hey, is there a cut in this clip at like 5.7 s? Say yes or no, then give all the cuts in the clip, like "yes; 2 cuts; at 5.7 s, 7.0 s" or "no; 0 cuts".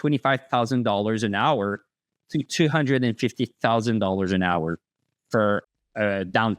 yes; 1 cut; at 5.7 s